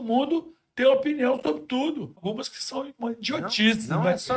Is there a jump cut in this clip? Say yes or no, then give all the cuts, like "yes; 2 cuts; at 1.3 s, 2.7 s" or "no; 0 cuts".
yes; 1 cut; at 2.1 s